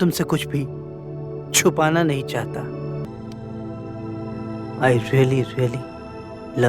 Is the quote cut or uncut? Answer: cut